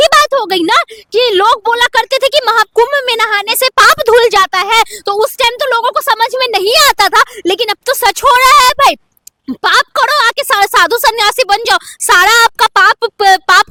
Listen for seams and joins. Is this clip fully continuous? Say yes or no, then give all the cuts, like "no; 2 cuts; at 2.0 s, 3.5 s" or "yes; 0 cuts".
yes; 0 cuts